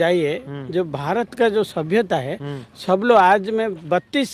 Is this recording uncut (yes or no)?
yes